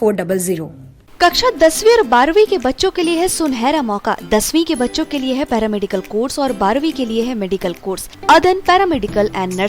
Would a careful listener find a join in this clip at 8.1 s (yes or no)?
yes